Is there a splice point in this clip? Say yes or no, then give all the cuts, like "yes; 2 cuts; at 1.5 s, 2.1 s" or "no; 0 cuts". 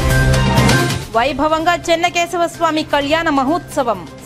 no; 0 cuts